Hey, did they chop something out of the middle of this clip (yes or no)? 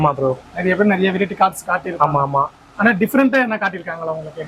no